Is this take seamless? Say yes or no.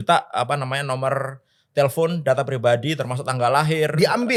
yes